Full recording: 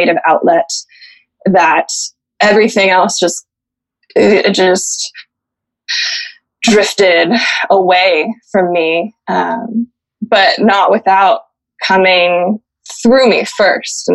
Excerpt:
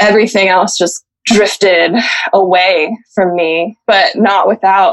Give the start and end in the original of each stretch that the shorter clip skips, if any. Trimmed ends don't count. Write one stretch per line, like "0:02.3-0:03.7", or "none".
0:03.5-0:06.4
0:09.1-0:10.2

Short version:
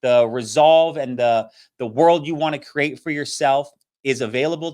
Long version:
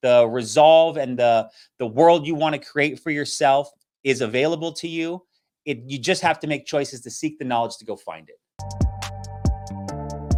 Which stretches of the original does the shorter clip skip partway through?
none

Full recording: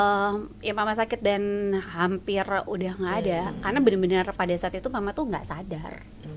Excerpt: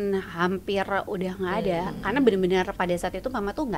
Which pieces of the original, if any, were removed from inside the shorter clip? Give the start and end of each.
none

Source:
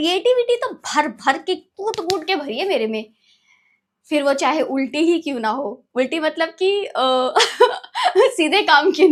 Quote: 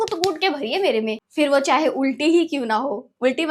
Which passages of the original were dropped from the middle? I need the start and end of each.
0:03.1-0:04.0

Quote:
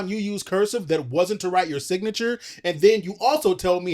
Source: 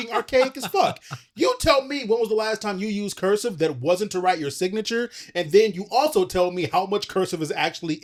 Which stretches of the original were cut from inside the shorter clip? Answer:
none

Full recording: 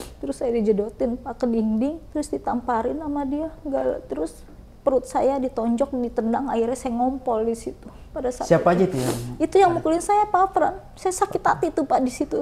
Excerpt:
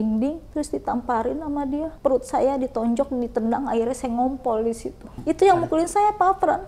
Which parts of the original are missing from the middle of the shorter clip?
0:03.5-0:04.7
0:07.9-0:09.2

